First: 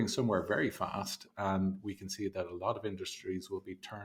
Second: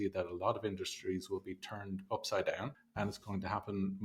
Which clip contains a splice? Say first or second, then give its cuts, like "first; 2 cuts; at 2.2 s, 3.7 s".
second; 1 cut; at 2.8 s